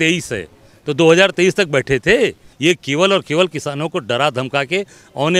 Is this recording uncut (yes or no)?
no